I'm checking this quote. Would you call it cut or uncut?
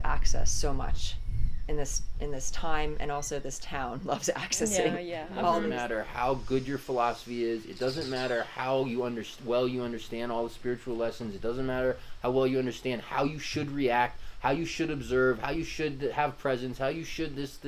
cut